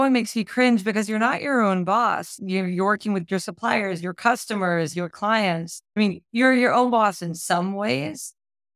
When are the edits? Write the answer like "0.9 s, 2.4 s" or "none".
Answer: none